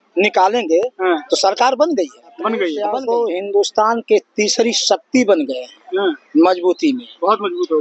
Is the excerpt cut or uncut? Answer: cut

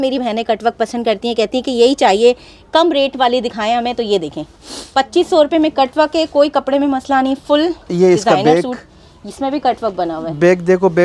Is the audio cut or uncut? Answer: uncut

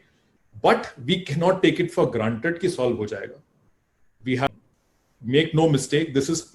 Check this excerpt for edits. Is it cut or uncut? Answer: cut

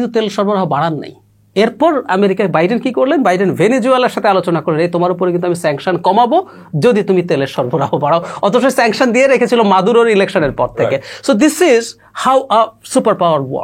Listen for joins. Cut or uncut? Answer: uncut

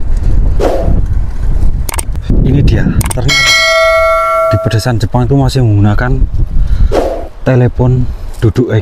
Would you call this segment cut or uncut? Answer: cut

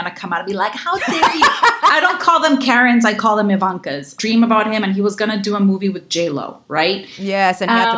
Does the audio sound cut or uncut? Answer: cut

